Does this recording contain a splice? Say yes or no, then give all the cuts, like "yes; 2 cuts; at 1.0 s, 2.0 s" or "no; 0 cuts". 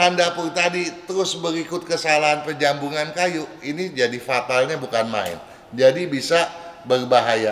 no; 0 cuts